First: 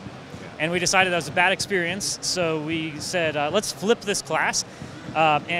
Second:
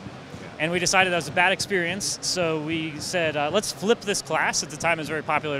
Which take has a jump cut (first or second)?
first